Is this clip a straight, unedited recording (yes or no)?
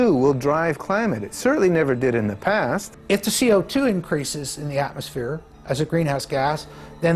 no